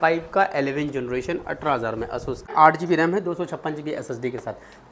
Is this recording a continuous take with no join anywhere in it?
no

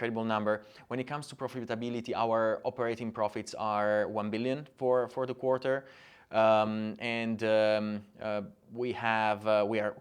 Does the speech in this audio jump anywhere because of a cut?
no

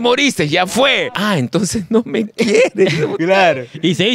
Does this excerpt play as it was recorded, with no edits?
no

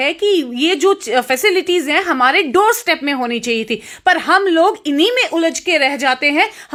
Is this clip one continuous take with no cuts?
yes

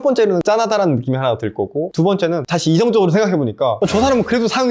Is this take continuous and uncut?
yes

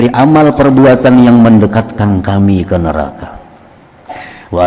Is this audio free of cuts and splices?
yes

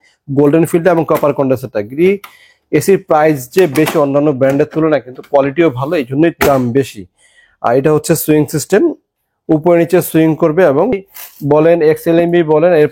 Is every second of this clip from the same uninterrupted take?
no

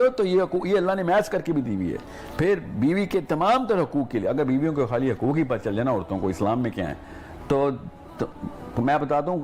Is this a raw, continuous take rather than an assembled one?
yes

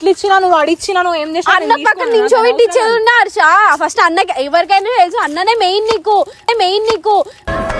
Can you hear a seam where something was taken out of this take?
no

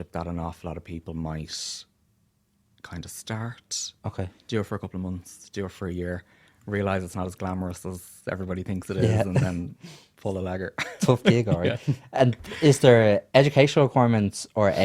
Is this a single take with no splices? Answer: yes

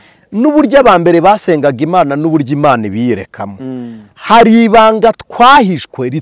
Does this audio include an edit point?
no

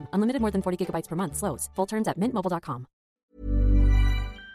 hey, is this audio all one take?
no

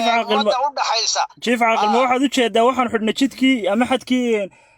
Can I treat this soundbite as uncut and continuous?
yes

